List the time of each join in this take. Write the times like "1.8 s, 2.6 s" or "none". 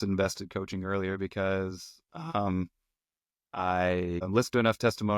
4.2 s